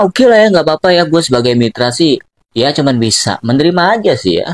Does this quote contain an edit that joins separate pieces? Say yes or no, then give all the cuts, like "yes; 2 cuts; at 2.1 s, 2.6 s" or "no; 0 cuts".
no; 0 cuts